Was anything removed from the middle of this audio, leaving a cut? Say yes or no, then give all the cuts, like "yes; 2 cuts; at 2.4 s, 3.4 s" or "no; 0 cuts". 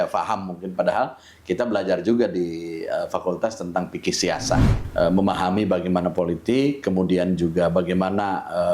yes; 1 cut; at 4.8 s